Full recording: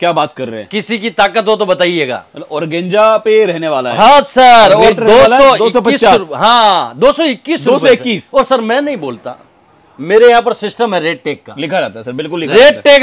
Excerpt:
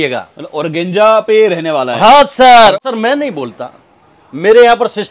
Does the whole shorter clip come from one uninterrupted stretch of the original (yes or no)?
no